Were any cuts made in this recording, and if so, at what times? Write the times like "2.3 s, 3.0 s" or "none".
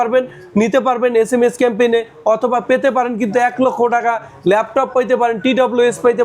none